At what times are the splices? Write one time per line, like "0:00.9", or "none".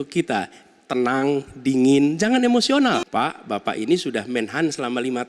0:03.1

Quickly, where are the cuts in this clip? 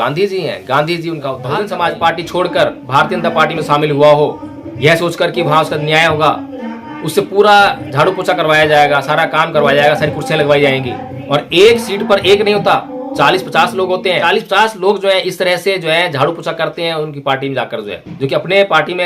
0:01.4
0:14.2

